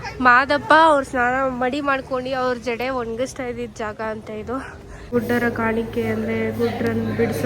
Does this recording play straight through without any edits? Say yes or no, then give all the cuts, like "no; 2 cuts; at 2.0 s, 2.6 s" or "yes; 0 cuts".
no; 1 cut; at 5.1 s